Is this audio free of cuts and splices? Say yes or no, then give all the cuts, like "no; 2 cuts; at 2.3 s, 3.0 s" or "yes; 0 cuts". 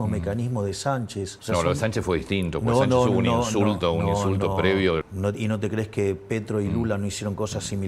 no; 2 cuts; at 1.4 s, 5.0 s